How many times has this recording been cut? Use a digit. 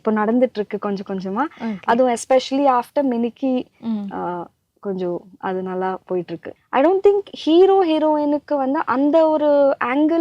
1